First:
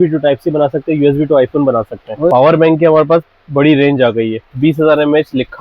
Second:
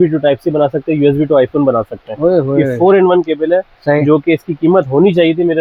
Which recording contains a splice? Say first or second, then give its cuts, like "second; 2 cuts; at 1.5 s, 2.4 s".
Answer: first; 2 cuts; at 2.3 s, 4.4 s